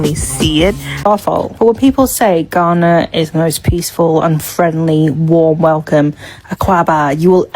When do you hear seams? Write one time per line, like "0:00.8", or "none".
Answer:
0:01.3

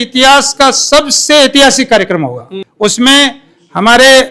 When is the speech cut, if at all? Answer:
none

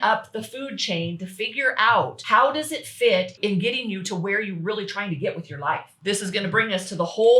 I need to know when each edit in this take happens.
0:02.2
0:03.3
0:05.9

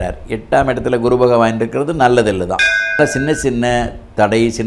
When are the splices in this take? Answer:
0:03.0

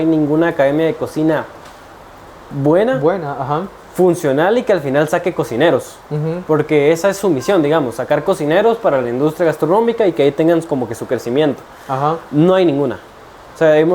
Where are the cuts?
none

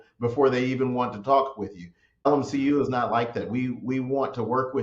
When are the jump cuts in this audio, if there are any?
0:02.3

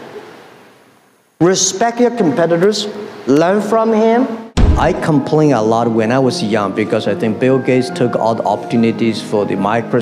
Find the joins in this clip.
0:04.6

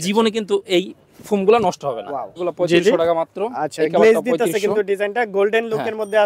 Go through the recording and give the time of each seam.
0:02.4

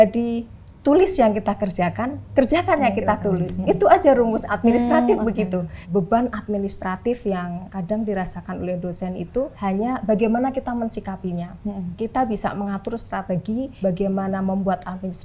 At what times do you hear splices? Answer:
0:02.1
0:05.8
0:07.7
0:09.5
0:13.7

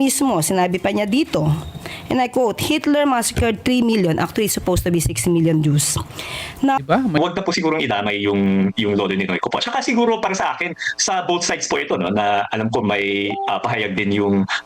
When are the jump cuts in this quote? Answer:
0:07.2

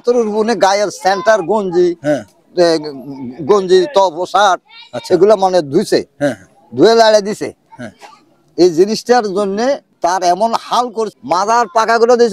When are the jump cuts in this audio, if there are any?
0:09.9
0:11.1

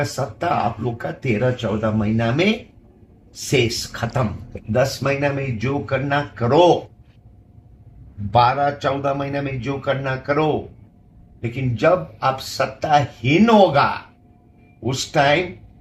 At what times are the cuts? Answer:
0:04.5

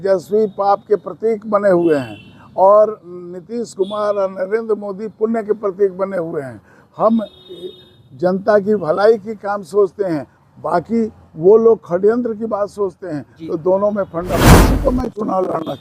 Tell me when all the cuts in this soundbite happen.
0:14.4

